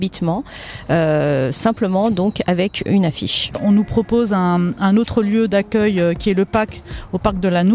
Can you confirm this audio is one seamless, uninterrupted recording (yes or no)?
no